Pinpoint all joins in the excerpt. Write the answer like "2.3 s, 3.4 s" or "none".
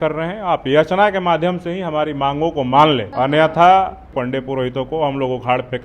3.1 s, 4.1 s